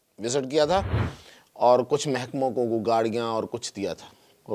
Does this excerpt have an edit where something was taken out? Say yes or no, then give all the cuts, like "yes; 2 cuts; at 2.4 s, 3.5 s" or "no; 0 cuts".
no; 0 cuts